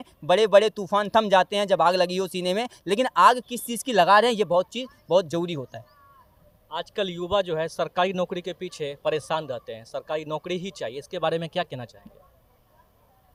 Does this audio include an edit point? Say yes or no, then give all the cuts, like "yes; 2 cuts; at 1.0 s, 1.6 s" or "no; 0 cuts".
no; 0 cuts